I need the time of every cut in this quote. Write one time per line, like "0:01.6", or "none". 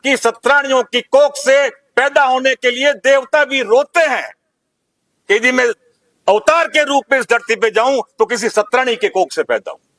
none